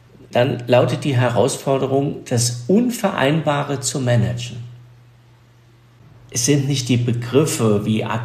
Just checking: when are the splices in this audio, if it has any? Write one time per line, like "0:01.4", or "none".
0:05.9